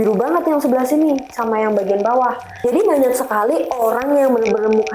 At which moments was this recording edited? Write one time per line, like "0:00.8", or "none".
0:02.5